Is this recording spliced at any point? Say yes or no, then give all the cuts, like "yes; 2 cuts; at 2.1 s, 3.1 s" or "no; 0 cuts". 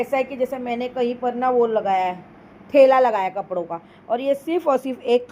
no; 0 cuts